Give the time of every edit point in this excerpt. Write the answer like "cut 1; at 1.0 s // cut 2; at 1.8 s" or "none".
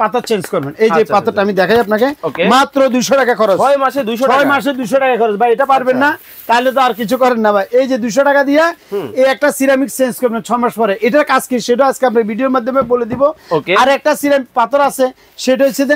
none